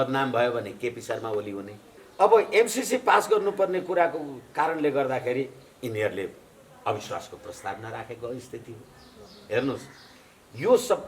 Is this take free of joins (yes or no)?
no